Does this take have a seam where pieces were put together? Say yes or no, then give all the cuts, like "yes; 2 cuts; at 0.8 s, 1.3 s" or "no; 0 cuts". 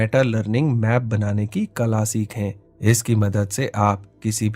no; 0 cuts